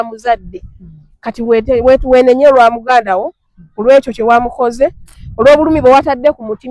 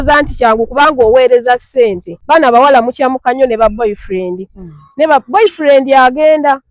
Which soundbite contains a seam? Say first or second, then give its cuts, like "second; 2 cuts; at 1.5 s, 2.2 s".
second; 1 cut; at 2.1 s